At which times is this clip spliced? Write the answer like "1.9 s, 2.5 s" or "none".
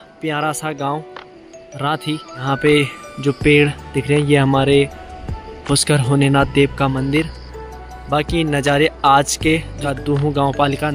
2.4 s, 9.8 s